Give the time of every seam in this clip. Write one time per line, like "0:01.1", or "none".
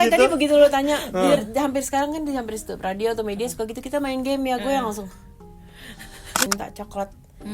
0:06.5